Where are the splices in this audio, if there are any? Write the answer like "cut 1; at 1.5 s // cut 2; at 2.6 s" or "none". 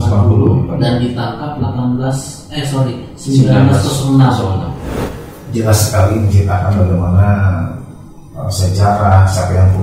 cut 1; at 4.9 s